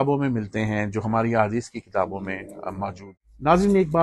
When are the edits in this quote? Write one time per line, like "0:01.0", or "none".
0:03.0